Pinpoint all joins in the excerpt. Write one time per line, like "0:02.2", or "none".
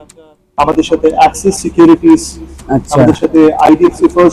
none

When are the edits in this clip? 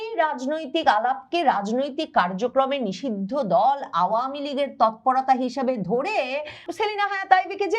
0:06.7

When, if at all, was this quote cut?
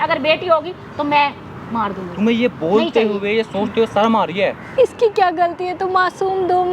0:04.6

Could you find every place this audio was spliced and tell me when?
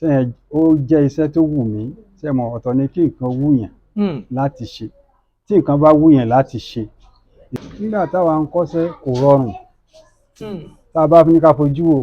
0:07.5

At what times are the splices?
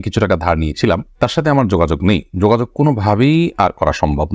none

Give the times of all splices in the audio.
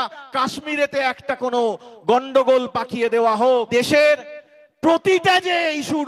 0:03.7

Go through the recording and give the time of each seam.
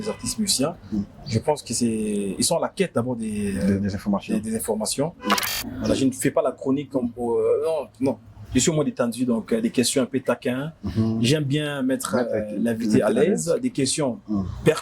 0:05.4

